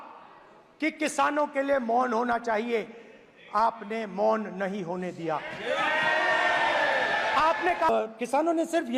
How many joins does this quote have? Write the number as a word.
one